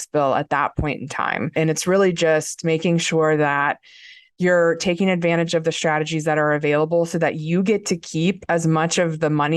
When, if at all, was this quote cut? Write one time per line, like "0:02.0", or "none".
0:01.5